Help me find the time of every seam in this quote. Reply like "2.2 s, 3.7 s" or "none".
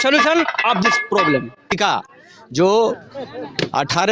1.6 s